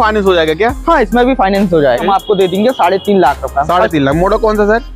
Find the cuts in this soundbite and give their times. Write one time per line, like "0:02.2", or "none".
0:02.0